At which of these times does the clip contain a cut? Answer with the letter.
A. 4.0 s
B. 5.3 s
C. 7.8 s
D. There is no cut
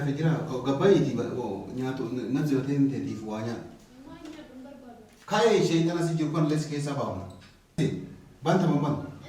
C